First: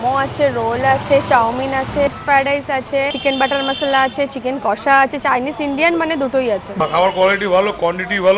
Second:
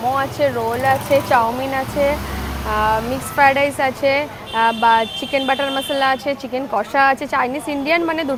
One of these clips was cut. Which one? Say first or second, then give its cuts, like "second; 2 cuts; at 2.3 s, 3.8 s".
first; 3 cuts; at 2.1 s, 3.1 s, 6.8 s